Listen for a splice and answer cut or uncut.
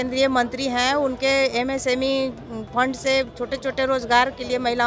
uncut